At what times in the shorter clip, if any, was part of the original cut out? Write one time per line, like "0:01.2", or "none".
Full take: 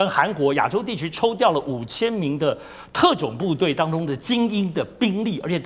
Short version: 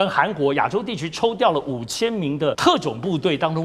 0:02.6